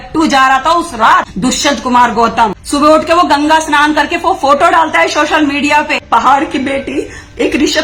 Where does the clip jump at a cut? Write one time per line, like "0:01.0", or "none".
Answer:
0:01.3
0:02.6
0:06.0